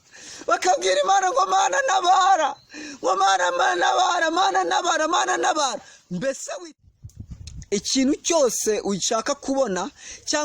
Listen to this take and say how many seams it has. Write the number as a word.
one